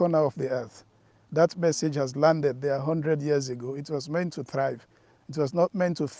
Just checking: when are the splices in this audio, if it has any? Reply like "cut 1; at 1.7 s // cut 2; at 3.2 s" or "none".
none